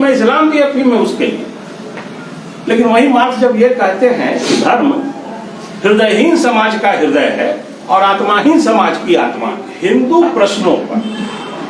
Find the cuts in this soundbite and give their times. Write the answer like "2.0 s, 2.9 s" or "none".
9.7 s